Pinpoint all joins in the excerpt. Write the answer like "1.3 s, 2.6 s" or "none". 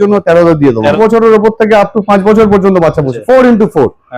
0.9 s, 3.1 s

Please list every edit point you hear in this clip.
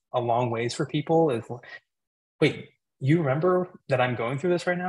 none

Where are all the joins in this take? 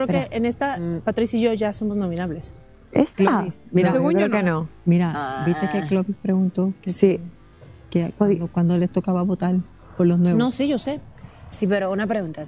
none

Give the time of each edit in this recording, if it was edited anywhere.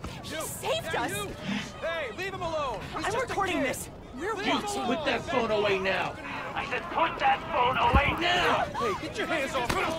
none

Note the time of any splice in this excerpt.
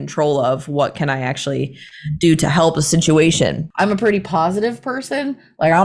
3.6 s

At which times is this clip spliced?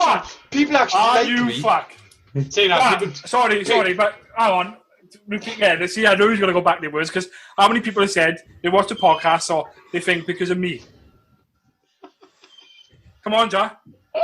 none

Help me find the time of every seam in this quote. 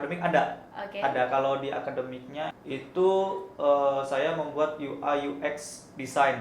2.6 s

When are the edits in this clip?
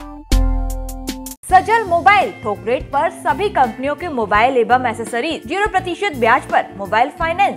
1.4 s, 5.4 s

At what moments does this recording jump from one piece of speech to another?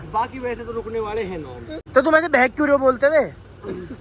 1.7 s

